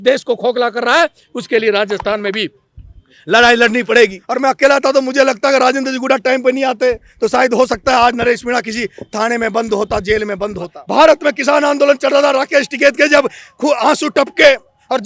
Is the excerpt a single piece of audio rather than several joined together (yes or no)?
no